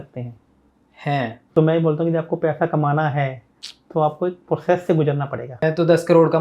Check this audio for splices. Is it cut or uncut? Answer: cut